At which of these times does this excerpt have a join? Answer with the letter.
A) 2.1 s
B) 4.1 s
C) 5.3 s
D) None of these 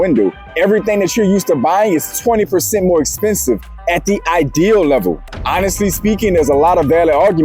C